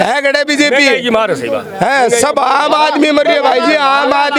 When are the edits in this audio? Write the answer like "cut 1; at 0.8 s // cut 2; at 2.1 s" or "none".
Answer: none